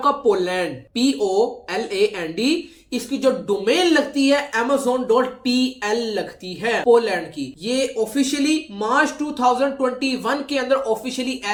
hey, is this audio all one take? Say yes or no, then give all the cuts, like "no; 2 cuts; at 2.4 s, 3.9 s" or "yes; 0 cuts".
yes; 0 cuts